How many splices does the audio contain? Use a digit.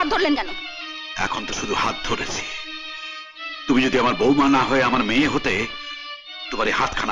0